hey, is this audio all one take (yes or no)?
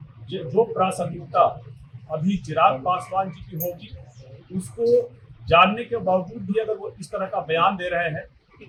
yes